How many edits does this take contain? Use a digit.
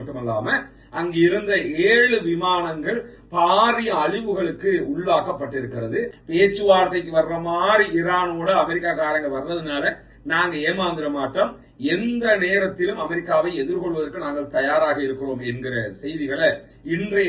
1